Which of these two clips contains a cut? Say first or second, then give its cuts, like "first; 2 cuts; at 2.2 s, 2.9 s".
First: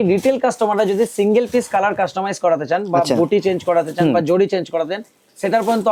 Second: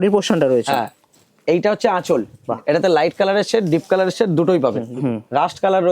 second; 2 cuts; at 2.3 s, 4.9 s